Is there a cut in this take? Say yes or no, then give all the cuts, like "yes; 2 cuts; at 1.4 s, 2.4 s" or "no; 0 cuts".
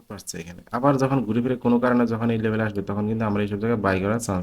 no; 0 cuts